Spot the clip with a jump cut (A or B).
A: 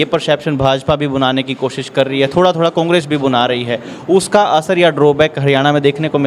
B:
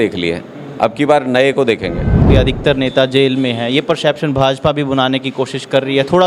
B